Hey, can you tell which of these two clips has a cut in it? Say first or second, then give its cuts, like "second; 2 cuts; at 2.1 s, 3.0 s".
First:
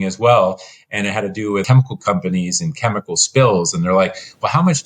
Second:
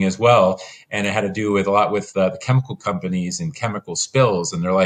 first; 1 cut; at 1.6 s